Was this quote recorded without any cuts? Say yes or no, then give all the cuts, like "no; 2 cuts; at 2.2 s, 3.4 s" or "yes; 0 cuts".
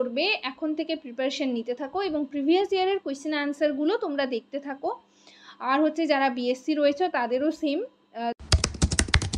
no; 1 cut; at 8.4 s